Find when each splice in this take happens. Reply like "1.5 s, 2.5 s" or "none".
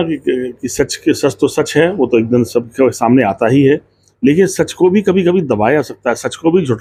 none